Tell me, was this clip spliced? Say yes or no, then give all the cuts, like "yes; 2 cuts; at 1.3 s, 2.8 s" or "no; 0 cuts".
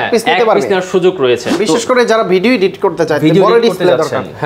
yes; 1 cut; at 1.5 s